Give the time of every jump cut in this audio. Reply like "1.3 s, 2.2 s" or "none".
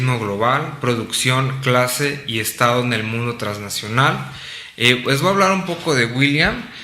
2.4 s